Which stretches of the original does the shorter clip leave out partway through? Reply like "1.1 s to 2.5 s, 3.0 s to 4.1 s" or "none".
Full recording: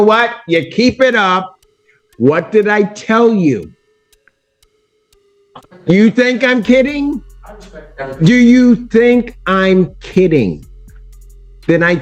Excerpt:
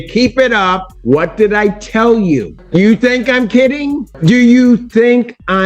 1.5 s to 2.0 s, 3.7 s to 5.7 s, 7.2 s to 8.1 s